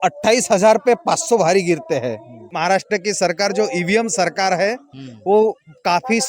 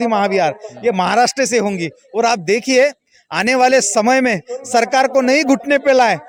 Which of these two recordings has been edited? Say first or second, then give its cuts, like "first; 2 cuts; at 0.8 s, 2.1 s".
first; 1 cut; at 2.5 s